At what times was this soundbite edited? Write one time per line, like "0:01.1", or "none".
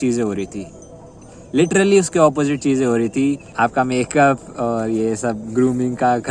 0:03.5